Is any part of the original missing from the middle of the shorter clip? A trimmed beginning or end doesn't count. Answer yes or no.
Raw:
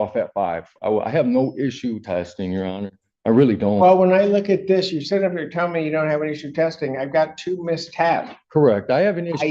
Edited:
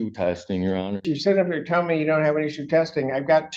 yes